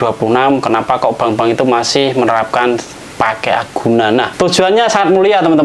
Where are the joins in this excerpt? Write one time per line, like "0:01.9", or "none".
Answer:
0:04.3